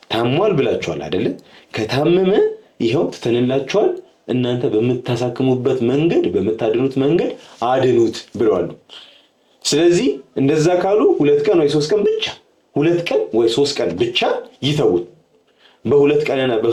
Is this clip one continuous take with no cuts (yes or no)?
yes